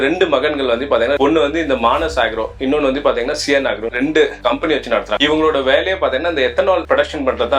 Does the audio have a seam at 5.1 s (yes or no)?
yes